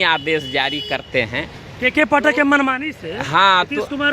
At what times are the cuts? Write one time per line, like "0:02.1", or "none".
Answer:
none